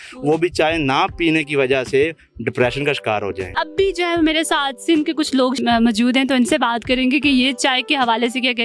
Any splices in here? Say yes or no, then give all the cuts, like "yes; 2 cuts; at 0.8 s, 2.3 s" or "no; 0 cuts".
no; 0 cuts